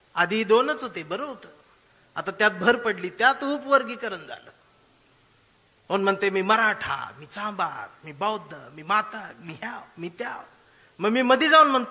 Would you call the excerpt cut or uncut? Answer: uncut